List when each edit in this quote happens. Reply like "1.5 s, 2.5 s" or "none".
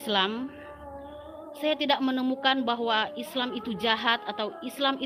none